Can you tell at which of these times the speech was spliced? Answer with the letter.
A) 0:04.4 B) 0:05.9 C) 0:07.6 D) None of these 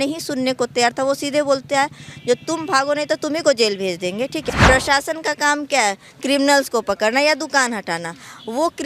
A